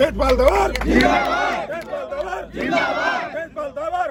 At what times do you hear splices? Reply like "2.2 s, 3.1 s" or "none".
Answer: none